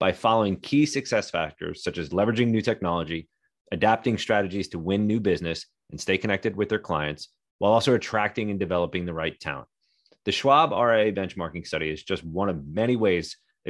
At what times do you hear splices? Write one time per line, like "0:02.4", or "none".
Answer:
none